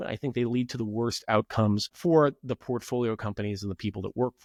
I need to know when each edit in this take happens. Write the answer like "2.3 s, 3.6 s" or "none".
none